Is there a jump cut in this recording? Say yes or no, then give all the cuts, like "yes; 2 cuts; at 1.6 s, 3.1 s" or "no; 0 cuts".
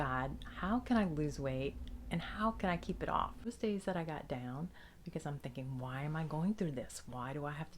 yes; 1 cut; at 3.5 s